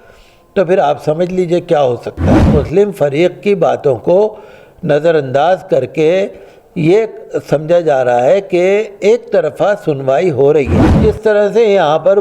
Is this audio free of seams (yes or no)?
no